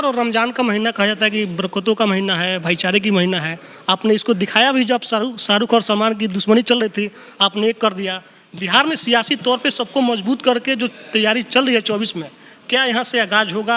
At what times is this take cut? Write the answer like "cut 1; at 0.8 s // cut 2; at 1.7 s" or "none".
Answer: none